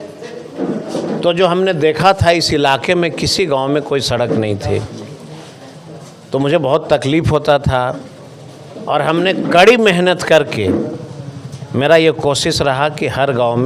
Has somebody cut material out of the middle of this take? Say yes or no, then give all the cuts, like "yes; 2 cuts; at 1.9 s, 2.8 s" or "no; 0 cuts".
no; 0 cuts